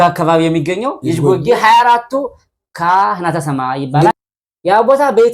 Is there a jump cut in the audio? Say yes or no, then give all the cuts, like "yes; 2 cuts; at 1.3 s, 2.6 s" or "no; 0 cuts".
yes; 1 cut; at 4.1 s